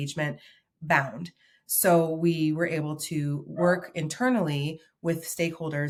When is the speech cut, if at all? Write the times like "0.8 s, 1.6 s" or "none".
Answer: none